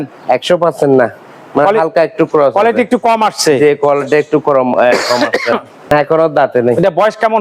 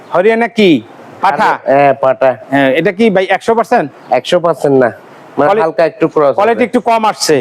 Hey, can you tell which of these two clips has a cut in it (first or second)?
first